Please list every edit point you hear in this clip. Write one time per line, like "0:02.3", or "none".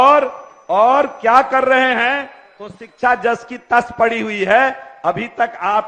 none

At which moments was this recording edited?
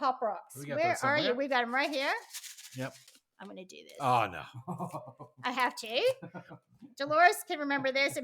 0:03.0

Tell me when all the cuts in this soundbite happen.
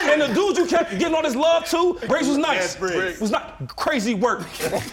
0:02.0

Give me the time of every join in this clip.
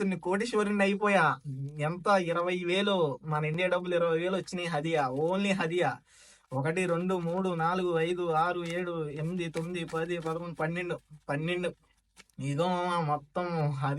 none

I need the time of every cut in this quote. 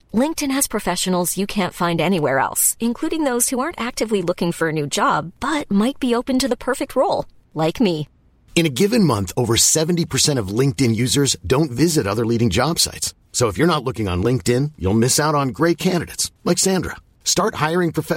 none

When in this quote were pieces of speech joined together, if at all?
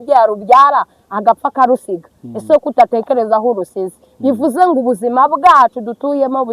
none

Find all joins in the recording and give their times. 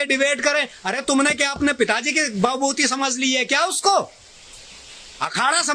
none

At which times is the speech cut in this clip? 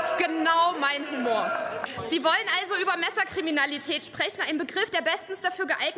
0:01.9

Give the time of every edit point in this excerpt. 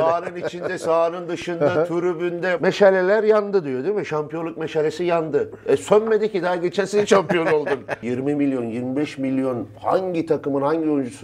0:02.6
0:08.0

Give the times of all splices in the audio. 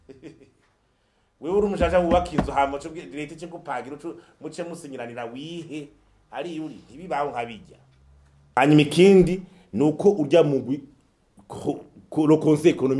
0:08.4

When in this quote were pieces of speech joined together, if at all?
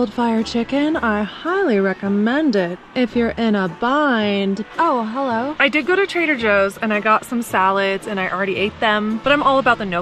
none

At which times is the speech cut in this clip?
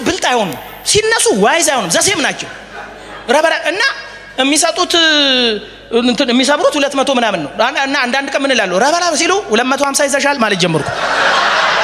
none

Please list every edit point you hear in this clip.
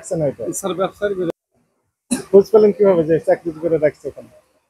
0:01.3

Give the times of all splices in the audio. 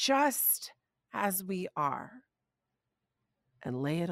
none

